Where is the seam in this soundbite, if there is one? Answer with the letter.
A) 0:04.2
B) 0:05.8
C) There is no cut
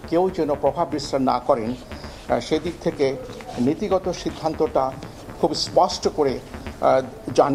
C